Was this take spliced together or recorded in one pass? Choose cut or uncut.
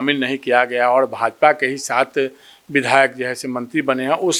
uncut